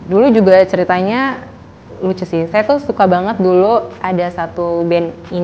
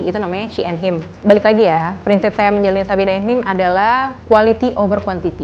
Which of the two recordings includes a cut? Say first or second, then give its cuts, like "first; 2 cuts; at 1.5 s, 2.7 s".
second; 2 cuts; at 1.1 s, 4.1 s